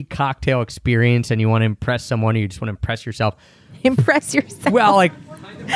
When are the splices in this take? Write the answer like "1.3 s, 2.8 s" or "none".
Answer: none